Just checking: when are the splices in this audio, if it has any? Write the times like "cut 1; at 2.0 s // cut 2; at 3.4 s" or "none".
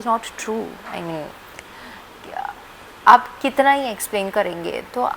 none